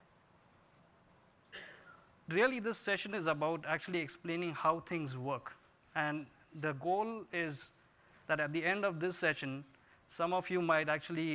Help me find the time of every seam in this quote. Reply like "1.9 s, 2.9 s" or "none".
none